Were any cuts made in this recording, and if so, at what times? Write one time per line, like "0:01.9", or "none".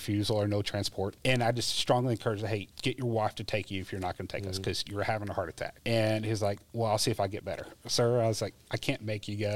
0:01.2
0:02.7
0:05.8
0:07.7